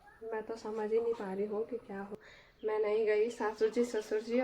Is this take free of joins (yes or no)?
no